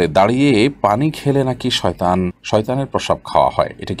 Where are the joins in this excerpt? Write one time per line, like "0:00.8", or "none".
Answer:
none